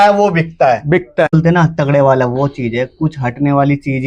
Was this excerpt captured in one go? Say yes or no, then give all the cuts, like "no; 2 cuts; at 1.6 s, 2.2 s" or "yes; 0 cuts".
no; 1 cut; at 1.3 s